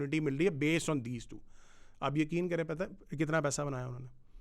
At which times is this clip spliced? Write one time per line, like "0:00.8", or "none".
none